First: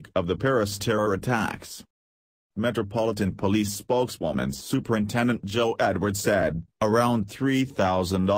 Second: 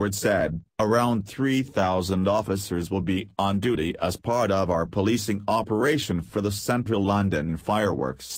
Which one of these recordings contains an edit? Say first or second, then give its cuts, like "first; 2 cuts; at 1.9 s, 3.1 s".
first; 1 cut; at 3.6 s